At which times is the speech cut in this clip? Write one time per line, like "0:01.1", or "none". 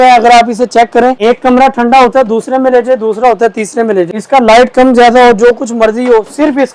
0:01.2
0:04.1